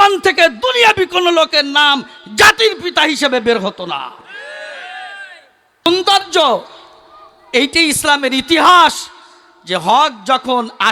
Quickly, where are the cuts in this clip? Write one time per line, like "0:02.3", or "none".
0:05.6